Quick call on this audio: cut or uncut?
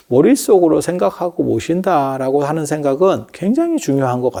uncut